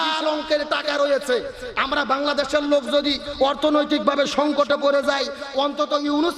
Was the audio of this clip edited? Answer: no; 0 cuts

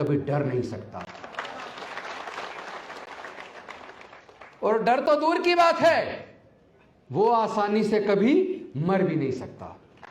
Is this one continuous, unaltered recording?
yes; 0 cuts

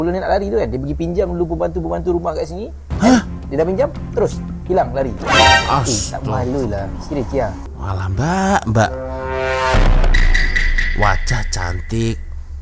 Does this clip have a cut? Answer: yes; 1 cut; at 7.7 s

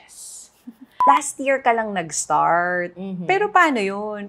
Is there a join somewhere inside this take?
yes; 1 cut; at 1.0 s

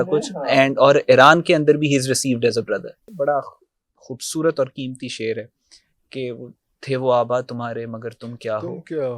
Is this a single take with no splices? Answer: no; 1 cut; at 3.1 s

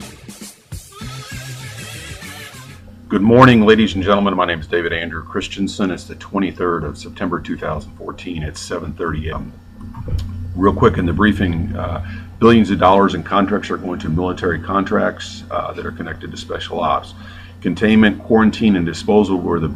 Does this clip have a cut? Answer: no; 0 cuts

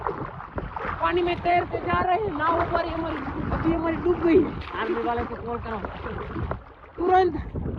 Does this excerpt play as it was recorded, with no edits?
yes; 0 cuts

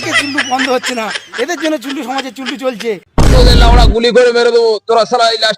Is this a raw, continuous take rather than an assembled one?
no; 1 cut; at 3.0 s

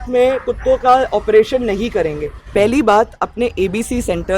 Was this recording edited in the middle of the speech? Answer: yes; 1 cut; at 2.4 s

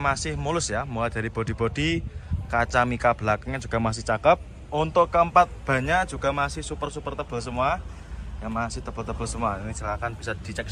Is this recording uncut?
yes; 0 cuts

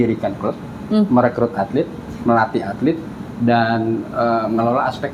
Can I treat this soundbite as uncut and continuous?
yes; 0 cuts

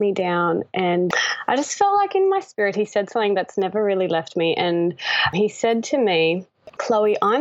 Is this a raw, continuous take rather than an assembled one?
no; 2 cuts; at 1.1 s, 5.3 s

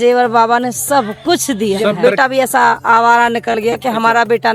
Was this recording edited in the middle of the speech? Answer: yes; 1 cut; at 2.0 s

